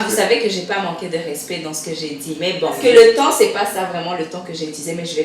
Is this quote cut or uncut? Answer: cut